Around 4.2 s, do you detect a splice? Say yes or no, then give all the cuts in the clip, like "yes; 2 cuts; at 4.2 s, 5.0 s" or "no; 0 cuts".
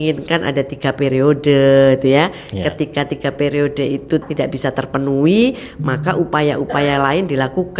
yes; 1 cut; at 4.2 s